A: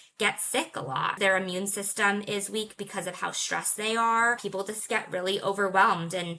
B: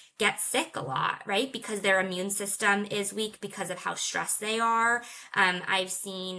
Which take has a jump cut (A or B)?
A